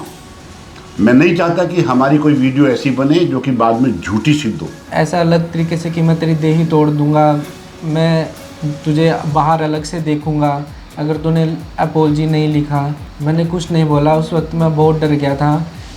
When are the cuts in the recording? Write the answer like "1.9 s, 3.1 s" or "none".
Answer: 4.8 s, 13.0 s

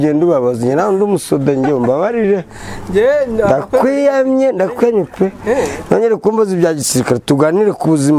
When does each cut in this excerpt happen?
none

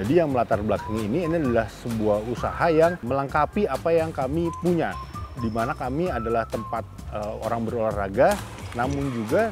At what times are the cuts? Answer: 3.0 s

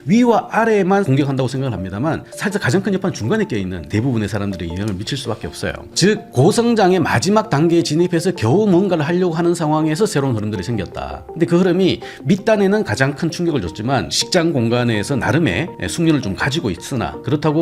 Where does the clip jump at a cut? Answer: 1.1 s, 3.9 s, 5.9 s, 14.1 s

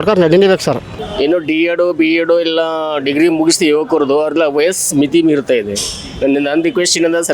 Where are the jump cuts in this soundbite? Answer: 0.9 s

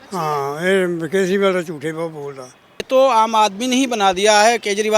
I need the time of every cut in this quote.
2.9 s

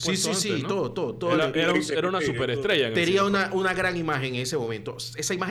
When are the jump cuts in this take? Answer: none

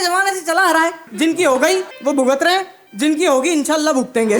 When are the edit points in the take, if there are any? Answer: 1.0 s, 1.9 s, 2.8 s

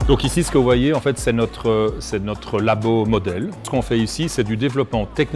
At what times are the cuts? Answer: 3.7 s

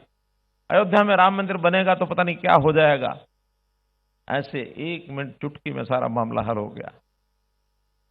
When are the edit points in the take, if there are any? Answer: none

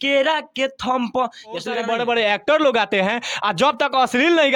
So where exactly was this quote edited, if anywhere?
1.8 s

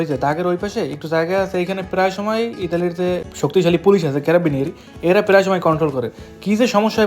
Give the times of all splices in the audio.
3.3 s

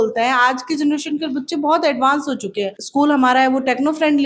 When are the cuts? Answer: 2.7 s

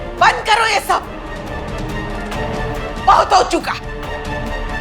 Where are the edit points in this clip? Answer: 3.8 s

